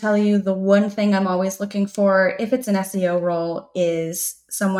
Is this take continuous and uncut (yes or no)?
yes